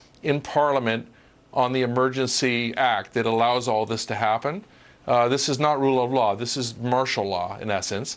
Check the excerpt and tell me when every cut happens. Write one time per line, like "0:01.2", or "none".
none